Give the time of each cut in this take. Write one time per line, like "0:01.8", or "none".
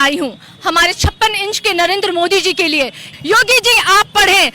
0:03.1